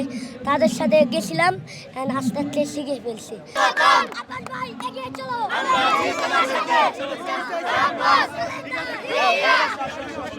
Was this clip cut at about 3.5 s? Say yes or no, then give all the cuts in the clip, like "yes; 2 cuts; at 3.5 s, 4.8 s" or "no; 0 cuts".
yes; 1 cut; at 3.5 s